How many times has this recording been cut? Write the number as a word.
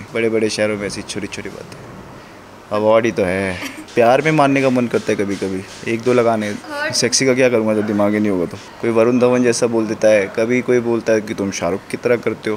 three